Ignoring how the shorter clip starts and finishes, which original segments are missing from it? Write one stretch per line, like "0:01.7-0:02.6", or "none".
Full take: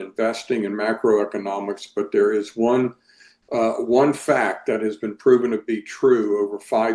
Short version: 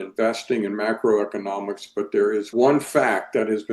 0:02.5-0:03.8